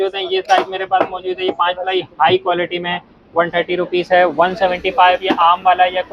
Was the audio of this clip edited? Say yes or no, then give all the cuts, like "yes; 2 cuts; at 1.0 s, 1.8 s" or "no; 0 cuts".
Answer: no; 0 cuts